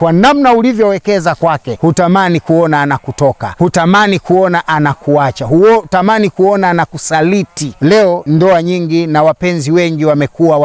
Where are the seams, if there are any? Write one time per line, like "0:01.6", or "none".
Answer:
0:01.7
0:03.5
0:08.1